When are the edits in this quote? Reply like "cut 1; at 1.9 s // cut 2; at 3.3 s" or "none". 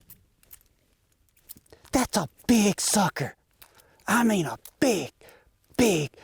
none